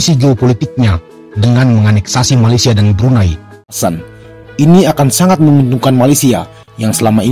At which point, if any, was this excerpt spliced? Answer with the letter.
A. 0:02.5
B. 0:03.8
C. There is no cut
B